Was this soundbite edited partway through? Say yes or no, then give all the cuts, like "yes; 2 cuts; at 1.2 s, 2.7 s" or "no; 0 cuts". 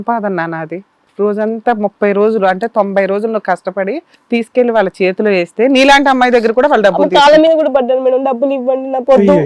yes; 2 cuts; at 1.0 s, 4.1 s